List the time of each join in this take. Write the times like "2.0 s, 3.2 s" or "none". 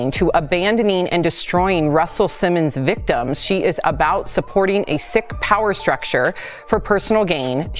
none